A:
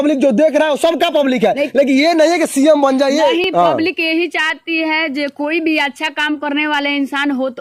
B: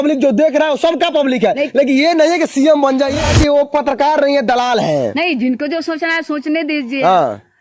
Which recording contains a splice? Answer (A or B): B